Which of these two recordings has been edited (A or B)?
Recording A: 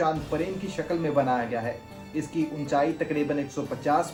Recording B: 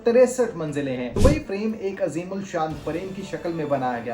B